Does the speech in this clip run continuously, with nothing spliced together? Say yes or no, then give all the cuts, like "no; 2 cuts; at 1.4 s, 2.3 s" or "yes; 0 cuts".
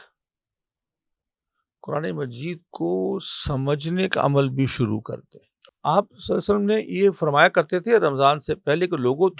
no; 1 cut; at 5.7 s